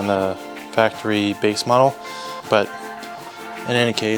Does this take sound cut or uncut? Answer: cut